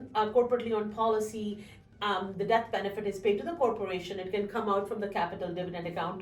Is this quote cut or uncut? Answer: uncut